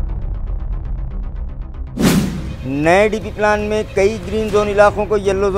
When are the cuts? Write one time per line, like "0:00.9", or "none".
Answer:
0:02.4

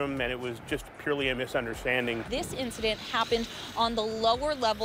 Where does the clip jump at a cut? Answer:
none

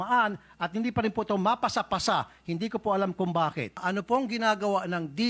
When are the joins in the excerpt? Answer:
0:03.8

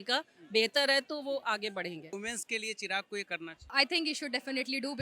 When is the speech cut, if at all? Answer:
0:02.1
0:03.7

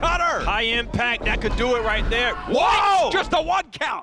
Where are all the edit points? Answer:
0:03.1

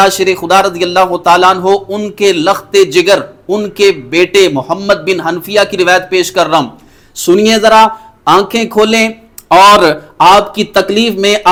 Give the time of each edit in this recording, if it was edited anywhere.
none

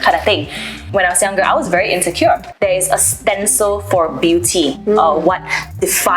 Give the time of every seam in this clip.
0:00.8
0:02.5

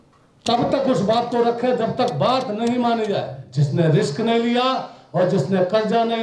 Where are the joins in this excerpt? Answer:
0:03.4

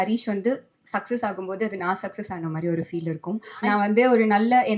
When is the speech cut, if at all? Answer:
0:03.6

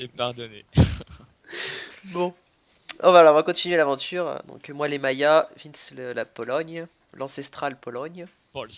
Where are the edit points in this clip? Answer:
0:03.8

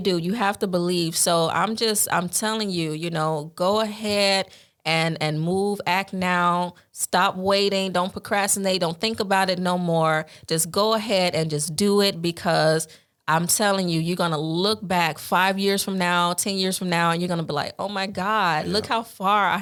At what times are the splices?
none

